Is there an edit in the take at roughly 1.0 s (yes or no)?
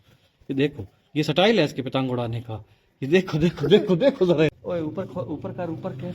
no